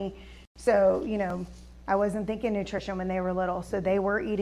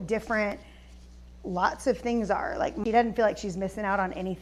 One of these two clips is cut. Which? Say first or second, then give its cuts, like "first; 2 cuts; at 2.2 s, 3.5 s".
second; 1 cut; at 2.8 s